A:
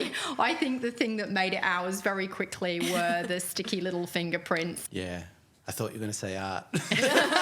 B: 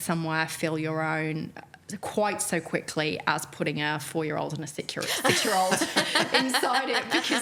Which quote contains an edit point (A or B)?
A